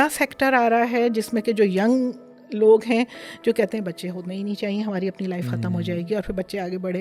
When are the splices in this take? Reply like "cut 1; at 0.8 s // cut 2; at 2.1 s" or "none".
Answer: none